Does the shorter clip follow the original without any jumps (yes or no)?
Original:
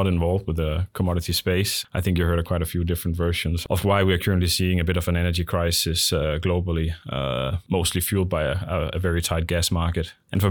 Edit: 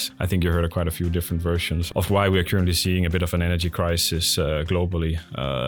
yes